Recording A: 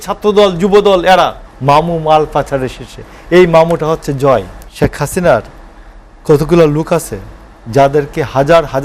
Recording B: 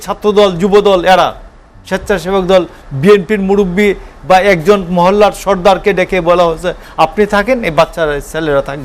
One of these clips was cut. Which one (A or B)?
A